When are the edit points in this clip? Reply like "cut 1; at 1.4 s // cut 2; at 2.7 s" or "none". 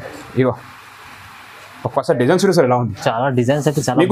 none